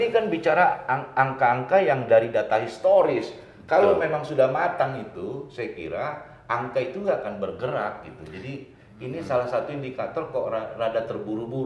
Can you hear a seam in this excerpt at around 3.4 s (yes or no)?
no